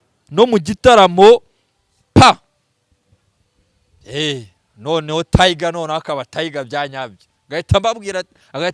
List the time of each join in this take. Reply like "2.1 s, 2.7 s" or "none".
none

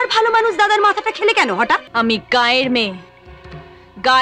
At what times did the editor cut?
1.9 s

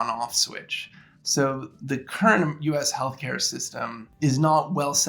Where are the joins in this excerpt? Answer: 1.7 s, 4.0 s

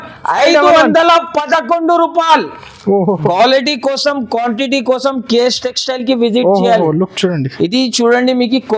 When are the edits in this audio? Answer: 3.2 s

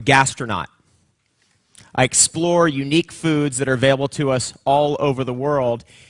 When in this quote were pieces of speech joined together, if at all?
5.0 s

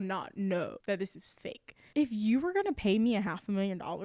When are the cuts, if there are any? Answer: 1.7 s

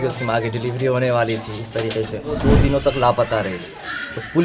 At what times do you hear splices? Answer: 2.4 s

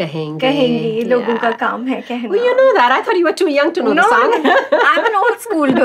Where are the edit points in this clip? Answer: none

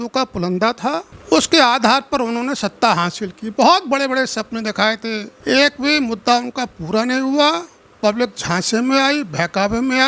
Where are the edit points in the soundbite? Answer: 1.1 s, 5.3 s

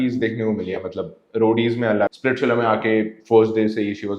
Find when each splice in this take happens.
2.1 s

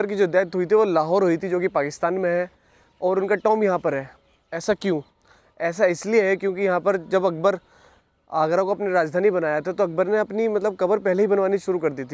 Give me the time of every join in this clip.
none

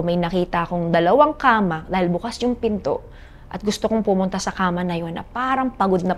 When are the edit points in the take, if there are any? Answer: none

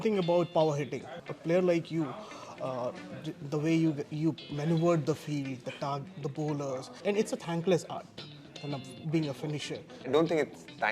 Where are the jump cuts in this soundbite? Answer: 1.2 s, 7.0 s, 10.1 s

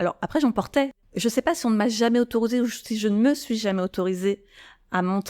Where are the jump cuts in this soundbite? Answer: 0.9 s

